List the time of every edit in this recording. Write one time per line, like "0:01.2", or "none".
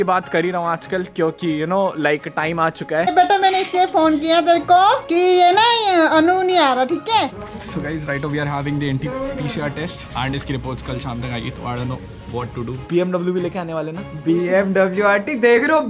0:03.1
0:07.3
0:12.8